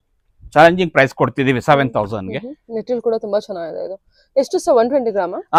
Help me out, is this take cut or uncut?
uncut